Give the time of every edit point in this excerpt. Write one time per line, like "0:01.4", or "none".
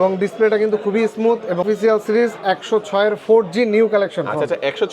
0:01.6